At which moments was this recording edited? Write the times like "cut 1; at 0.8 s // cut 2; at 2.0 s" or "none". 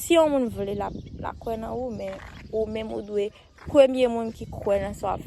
none